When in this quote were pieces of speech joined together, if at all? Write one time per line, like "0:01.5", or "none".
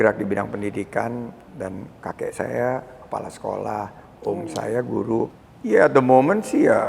0:05.3